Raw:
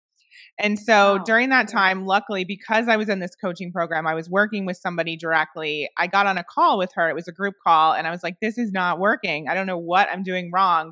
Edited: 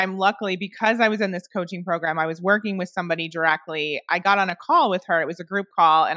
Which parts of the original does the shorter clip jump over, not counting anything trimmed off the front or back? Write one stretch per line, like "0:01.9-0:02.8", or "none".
none